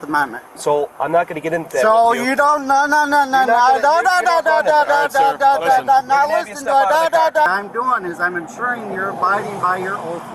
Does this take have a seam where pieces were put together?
yes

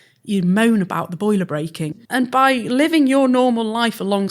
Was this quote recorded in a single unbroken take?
no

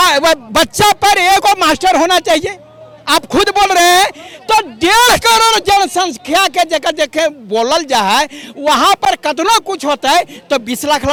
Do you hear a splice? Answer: no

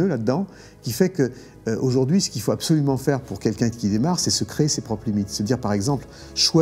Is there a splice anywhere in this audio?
no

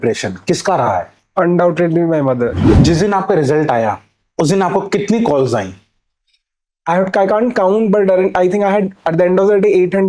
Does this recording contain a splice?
yes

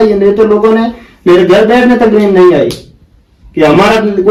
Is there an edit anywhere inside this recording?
no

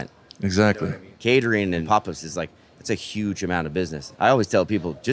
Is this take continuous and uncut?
no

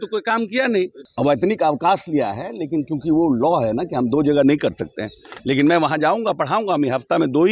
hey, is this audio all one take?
no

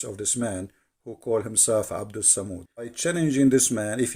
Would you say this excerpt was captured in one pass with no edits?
no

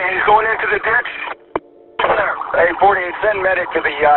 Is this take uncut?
no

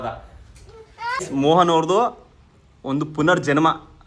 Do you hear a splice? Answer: yes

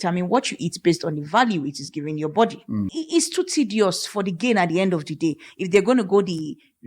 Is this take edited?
yes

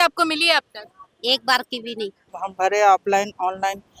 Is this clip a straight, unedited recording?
no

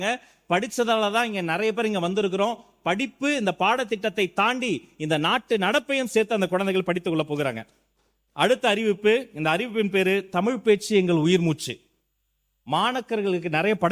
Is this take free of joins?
yes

